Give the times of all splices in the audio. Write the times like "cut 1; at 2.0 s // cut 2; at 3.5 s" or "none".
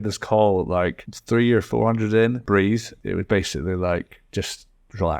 cut 1; at 1.1 s // cut 2; at 2.9 s